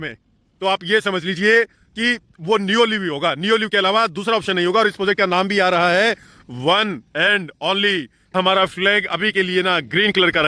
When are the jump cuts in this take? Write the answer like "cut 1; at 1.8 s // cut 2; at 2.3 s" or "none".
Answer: cut 1; at 8.3 s